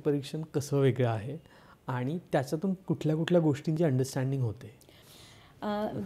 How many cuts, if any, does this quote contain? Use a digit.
0